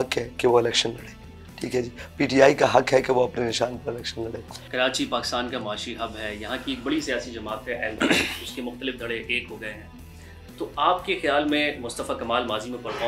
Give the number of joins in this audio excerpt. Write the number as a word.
zero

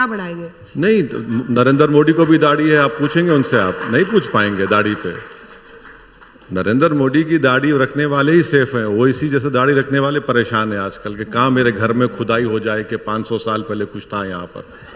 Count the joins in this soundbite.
zero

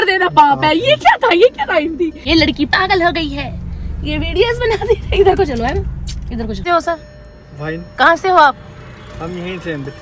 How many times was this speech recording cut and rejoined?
two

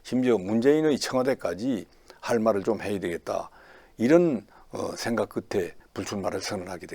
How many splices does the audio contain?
one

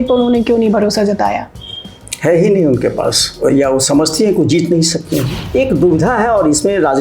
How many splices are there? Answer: one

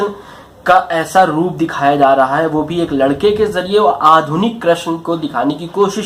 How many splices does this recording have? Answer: zero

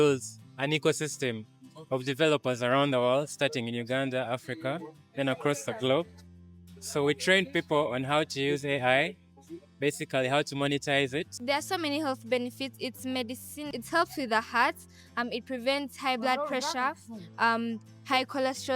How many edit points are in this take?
two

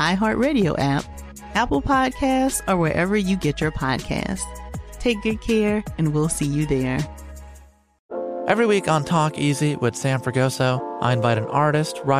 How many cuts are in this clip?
one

